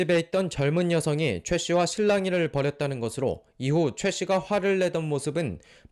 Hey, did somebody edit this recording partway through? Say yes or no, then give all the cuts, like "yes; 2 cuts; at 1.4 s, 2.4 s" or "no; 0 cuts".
yes; 1 cut; at 4.4 s